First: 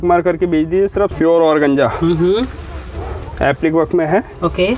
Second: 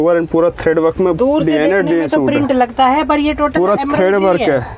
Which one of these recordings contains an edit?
first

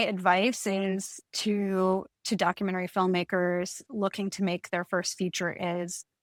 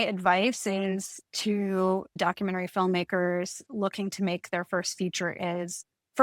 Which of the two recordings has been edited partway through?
second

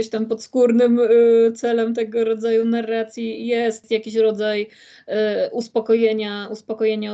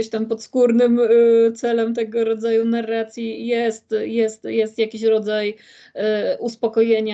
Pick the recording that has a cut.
first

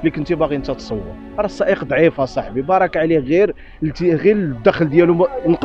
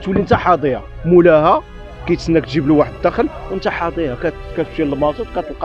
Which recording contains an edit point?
first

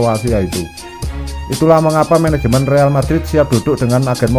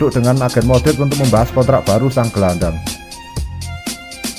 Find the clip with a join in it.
second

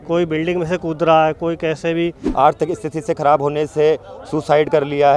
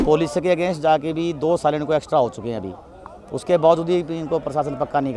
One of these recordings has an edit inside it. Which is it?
first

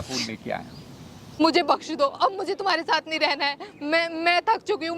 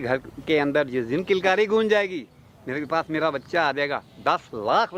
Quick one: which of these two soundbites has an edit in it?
first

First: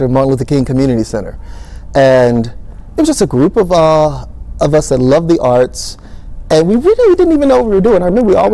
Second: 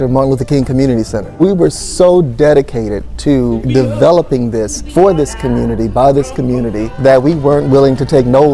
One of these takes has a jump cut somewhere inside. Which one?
second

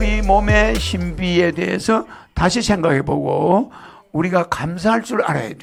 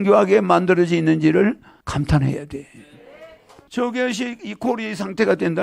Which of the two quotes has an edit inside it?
second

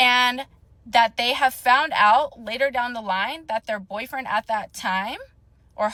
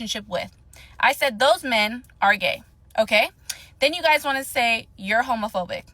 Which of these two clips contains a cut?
second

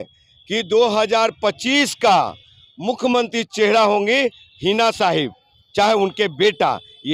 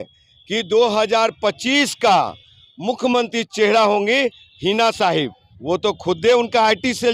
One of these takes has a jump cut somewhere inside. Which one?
second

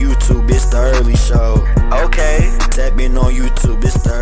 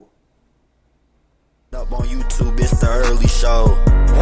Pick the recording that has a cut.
second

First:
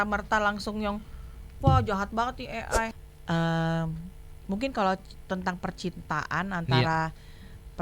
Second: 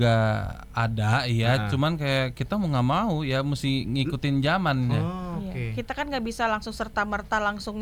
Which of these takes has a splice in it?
first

